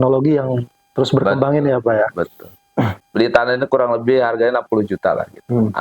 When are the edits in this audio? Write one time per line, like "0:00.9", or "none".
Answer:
0:03.0

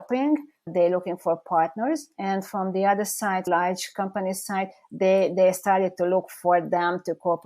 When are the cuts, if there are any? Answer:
0:03.5

